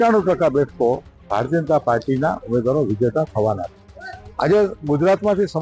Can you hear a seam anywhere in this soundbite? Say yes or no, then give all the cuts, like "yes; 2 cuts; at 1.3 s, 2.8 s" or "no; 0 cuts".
no; 0 cuts